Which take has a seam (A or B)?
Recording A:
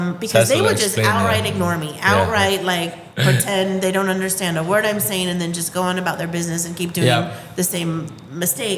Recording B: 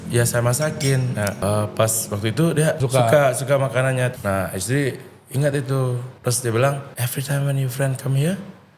B